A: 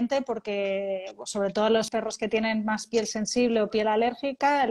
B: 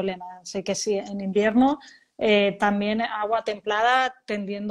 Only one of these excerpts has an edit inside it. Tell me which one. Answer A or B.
A